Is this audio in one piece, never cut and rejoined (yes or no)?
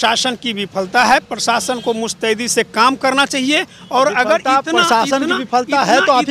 yes